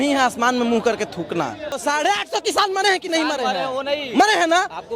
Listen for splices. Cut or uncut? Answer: cut